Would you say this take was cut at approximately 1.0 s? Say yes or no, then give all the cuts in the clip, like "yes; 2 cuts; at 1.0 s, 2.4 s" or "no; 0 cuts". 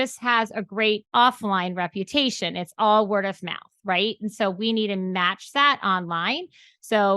yes; 1 cut; at 1.0 s